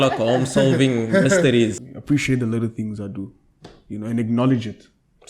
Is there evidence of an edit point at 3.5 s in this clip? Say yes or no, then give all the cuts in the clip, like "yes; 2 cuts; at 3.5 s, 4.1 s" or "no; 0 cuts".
no; 1 cut; at 1.9 s